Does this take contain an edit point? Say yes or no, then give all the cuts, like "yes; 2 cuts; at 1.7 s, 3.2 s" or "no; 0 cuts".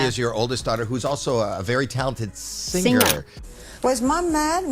yes; 1 cut; at 3.3 s